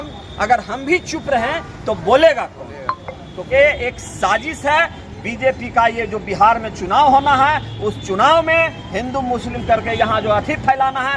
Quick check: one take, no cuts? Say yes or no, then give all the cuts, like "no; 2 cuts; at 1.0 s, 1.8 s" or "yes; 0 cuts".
no; 1 cut; at 3.3 s